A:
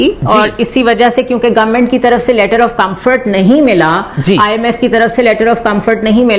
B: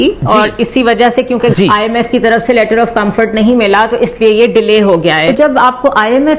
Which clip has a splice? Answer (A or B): B